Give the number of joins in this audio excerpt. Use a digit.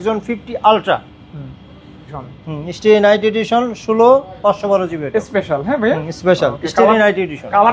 1